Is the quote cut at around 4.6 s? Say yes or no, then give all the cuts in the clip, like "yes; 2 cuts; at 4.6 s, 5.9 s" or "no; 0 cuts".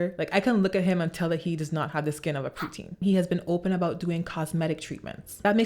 no; 1 cut; at 3.0 s